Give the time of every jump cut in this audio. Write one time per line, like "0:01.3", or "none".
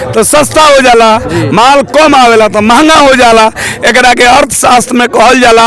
none

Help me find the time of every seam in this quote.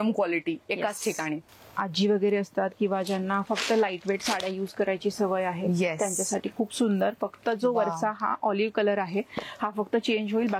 0:01.4

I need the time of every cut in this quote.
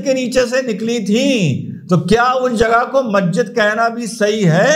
none

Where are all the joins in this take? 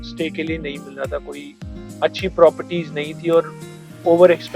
none

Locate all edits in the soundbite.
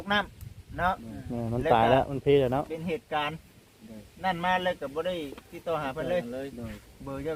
none

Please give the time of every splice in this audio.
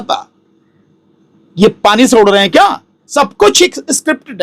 0:03.0

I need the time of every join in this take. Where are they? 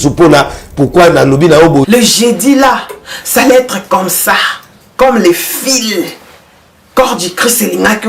0:01.9

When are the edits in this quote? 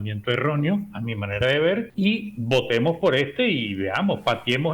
0:01.9

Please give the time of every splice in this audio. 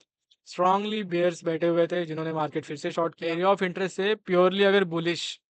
0:03.2

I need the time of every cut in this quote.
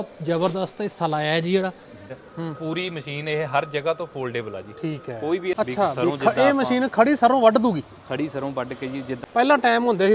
0:02.1
0:05.5
0:09.2

